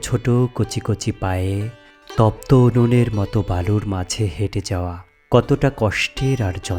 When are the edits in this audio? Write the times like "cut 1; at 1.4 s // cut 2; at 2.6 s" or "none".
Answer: none